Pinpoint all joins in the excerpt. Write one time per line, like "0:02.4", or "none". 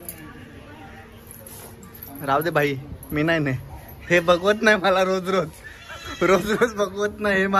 none